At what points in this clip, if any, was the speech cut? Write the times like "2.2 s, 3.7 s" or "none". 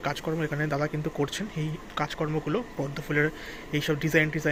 none